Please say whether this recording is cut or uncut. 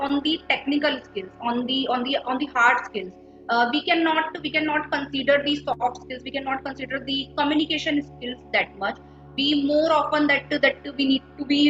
uncut